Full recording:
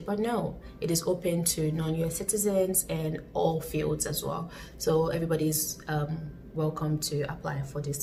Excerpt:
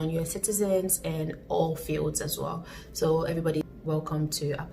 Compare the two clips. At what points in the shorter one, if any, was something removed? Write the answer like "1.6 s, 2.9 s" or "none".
3.6 s

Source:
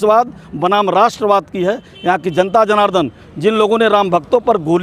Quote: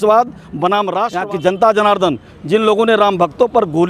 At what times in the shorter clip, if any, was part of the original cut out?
1.1 s

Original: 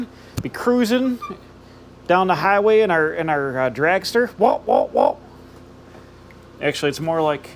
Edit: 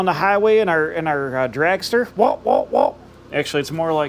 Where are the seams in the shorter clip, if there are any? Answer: 3.1 s

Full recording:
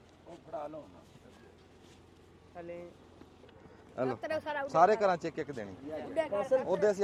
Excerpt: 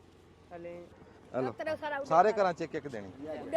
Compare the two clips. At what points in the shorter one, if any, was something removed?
1.0 s

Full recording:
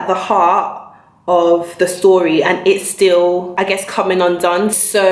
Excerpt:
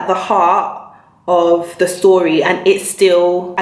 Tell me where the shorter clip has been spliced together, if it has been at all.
none

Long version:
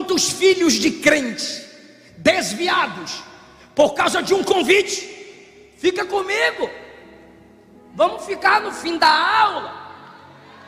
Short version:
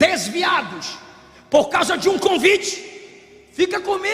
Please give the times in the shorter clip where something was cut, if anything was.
none

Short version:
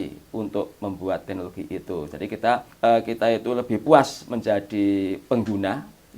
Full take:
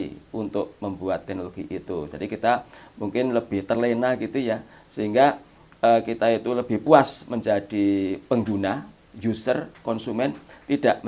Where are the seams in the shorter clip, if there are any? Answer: 2.7 s

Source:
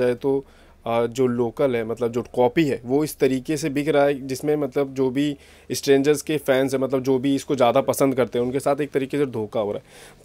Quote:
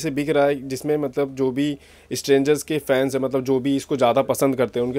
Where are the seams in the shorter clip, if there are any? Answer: none

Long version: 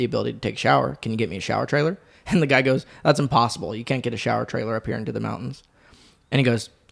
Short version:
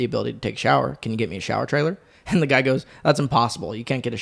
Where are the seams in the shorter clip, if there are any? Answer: none

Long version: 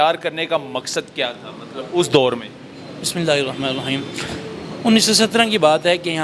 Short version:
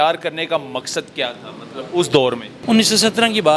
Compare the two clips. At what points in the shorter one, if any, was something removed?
2.5 s

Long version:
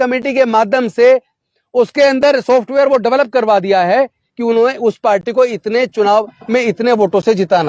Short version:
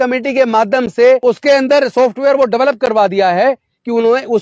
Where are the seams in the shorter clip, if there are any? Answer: 1.2 s

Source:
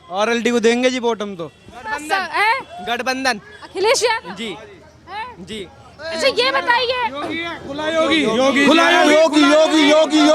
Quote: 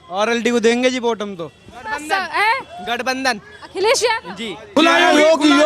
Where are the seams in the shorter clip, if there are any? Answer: 4.8 s

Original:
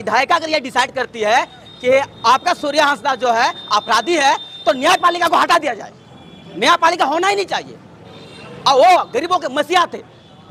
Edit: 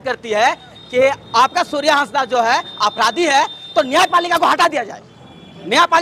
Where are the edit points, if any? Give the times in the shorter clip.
none

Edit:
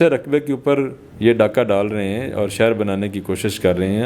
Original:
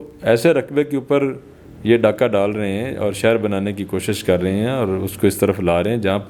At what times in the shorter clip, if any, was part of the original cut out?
1.0 s

